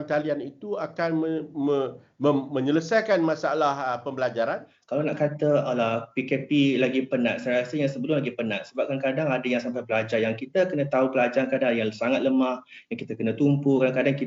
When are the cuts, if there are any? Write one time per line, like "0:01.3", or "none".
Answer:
0:04.7